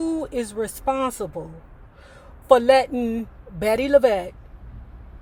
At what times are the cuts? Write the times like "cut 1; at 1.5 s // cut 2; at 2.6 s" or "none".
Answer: none